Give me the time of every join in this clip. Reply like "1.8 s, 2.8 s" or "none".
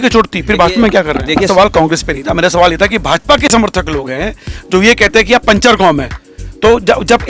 1.5 s

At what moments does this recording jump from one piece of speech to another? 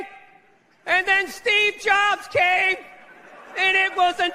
2.8 s

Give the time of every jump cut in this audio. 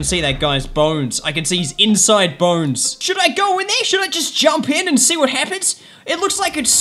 2.9 s

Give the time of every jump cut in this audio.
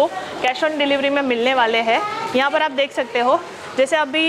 none

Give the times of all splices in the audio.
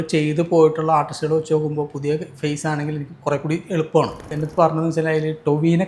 4.3 s

